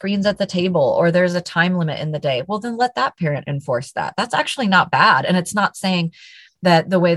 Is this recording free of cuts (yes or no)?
yes